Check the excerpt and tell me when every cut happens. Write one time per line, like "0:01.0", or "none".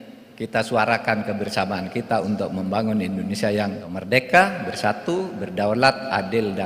0:03.9